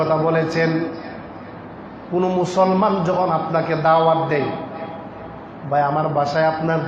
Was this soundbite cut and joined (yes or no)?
no